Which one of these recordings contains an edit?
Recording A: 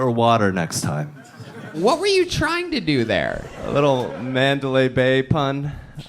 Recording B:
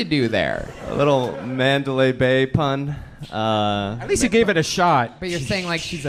A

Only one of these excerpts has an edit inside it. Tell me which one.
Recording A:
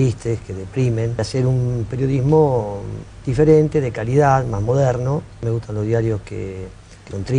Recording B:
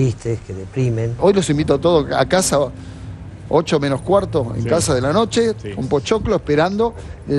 B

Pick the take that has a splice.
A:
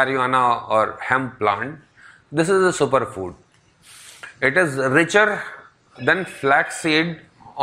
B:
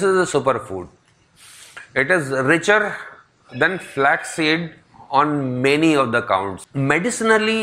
B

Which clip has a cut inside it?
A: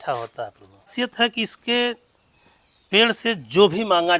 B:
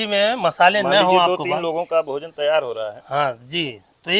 A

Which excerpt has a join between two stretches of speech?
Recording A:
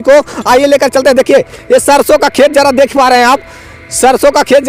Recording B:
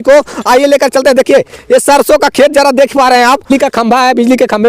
B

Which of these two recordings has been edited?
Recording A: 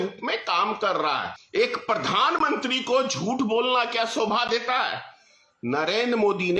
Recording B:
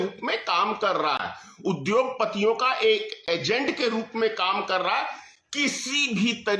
A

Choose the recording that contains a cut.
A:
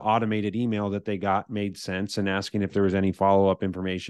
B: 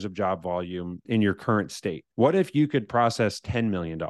B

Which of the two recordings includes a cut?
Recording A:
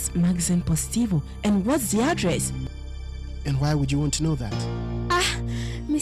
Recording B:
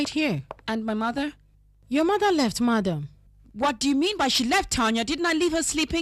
B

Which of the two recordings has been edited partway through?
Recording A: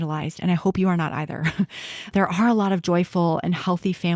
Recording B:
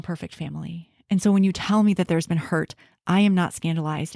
A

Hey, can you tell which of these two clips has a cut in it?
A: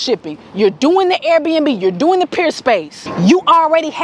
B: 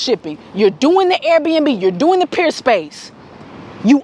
A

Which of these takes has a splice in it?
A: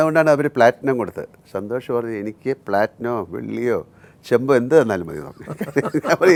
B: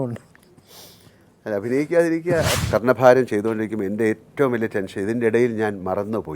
B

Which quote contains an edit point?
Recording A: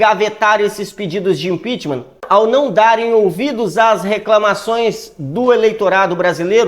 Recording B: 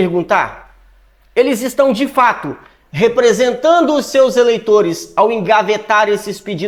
A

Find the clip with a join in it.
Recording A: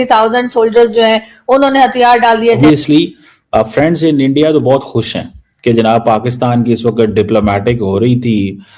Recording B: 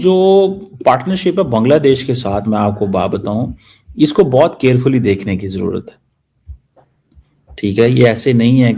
A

